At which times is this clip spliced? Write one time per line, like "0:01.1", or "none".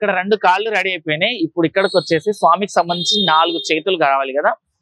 none

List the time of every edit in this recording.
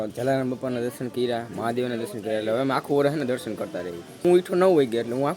0:04.2

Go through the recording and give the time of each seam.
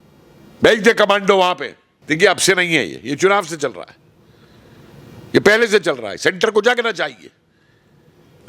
0:02.0

